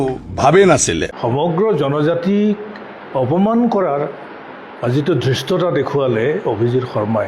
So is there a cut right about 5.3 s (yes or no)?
no